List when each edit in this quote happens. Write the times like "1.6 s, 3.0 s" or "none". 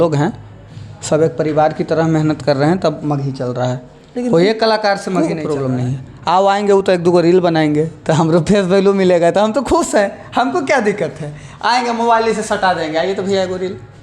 5.5 s

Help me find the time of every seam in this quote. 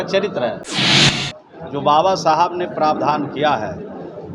1.0 s

